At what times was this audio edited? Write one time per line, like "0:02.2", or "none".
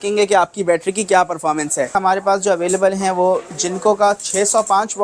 0:01.9